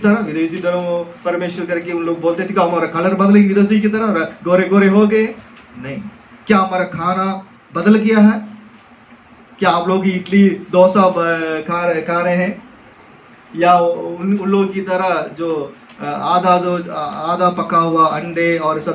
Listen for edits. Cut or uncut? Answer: uncut